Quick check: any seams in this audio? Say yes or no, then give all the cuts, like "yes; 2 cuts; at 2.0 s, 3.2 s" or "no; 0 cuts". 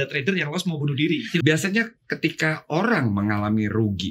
yes; 1 cut; at 1.4 s